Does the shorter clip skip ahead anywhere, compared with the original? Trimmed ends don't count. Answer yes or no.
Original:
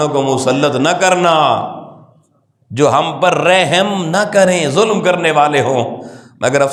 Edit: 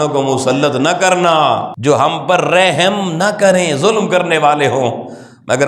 yes